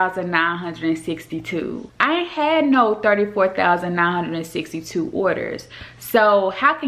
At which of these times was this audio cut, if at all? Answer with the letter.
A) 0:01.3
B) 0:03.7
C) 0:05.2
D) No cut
D